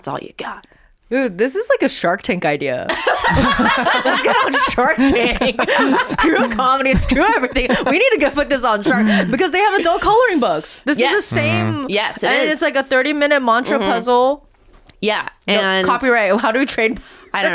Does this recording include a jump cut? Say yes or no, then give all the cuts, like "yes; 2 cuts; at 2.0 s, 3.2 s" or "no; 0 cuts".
no; 0 cuts